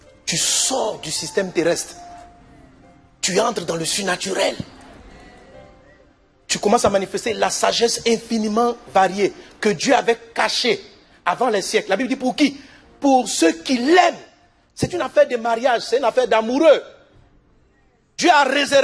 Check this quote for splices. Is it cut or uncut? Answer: uncut